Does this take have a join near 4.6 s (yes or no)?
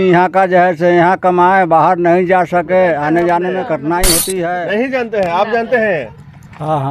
yes